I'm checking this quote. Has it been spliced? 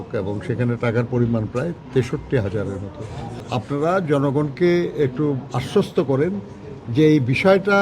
yes; 1 cut; at 3.4 s

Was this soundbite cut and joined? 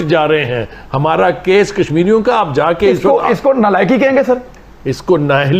no; 0 cuts

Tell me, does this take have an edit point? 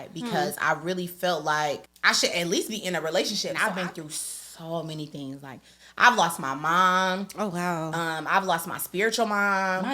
yes; 2 cuts; at 1.9 s, 3.5 s

